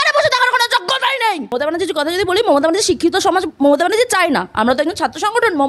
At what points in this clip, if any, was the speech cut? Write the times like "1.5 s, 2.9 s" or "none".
1.6 s